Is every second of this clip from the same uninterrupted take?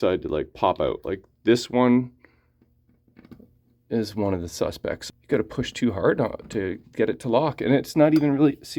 no; 1 cut; at 5.0 s

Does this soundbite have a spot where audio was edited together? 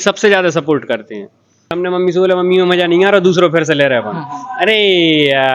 yes; 1 cut; at 1.7 s

